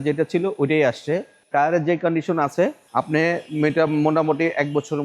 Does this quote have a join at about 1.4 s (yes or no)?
yes